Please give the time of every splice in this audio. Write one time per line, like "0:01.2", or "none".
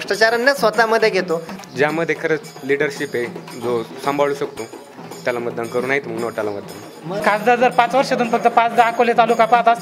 0:01.5
0:07.1